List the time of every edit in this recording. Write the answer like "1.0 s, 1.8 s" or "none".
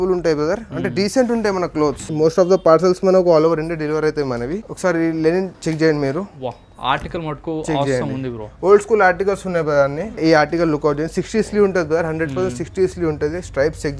2.1 s, 4.7 s, 5.6 s, 10.2 s